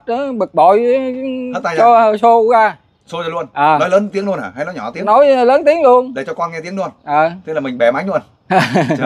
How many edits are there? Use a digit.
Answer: 0